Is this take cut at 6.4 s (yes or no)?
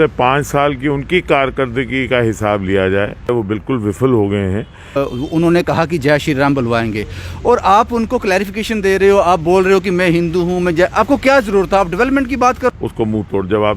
no